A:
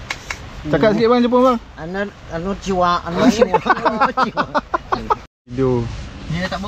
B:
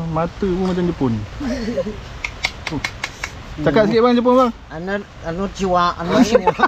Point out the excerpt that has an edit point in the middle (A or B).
A